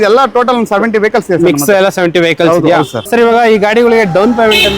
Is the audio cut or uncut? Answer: cut